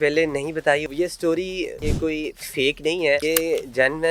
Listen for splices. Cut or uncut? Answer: cut